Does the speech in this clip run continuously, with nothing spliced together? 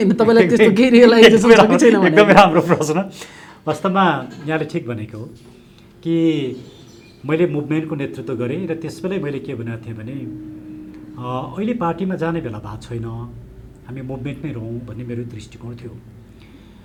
yes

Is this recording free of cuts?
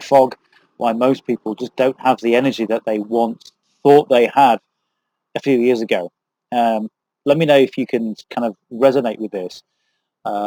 yes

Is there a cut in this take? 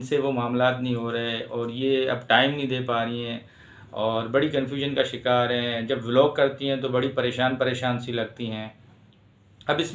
no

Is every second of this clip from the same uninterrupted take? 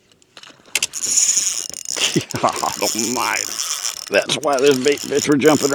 yes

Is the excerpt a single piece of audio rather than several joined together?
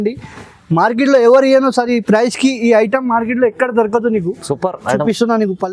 yes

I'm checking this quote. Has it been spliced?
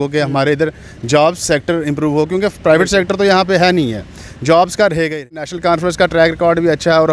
yes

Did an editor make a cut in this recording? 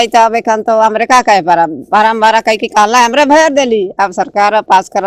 no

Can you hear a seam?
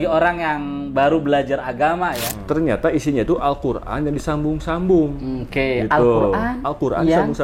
yes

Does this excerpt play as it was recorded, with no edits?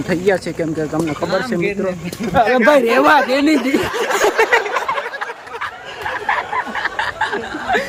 yes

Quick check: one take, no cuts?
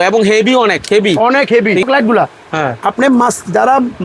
no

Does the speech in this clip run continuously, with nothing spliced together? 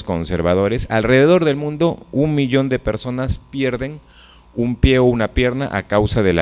no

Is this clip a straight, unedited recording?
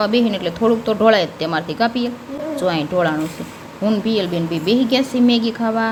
yes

